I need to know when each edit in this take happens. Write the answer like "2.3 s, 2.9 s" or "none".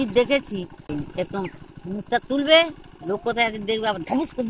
0.9 s